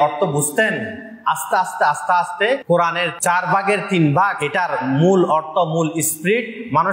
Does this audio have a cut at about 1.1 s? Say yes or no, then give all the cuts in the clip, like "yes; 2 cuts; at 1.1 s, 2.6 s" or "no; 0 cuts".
no; 2 cuts; at 2.8 s, 4.4 s